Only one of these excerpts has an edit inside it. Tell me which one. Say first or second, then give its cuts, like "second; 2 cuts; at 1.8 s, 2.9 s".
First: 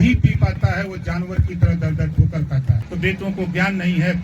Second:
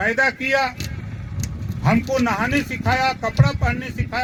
first; 1 cut; at 2.8 s